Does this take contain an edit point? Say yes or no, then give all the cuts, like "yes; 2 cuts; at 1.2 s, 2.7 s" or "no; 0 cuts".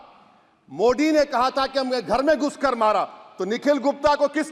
no; 0 cuts